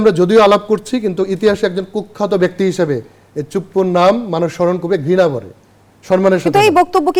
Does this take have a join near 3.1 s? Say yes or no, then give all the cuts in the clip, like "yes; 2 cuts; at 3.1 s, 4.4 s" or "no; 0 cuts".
no; 0 cuts